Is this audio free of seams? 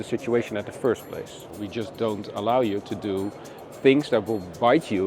no; 1 cut; at 1.5 s

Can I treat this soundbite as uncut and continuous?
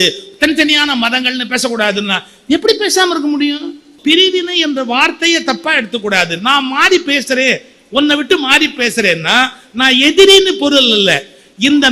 no; 1 cut; at 3.9 s

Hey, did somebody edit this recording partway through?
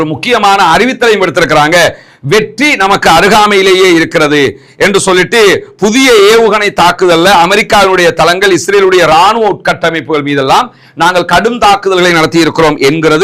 no; 0 cuts

